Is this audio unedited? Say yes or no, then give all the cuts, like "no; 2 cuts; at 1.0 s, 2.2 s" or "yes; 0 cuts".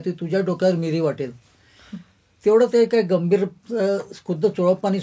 yes; 0 cuts